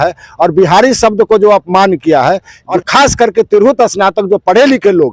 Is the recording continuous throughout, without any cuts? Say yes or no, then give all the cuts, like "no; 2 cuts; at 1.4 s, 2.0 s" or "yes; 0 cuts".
no; 1 cut; at 2.6 s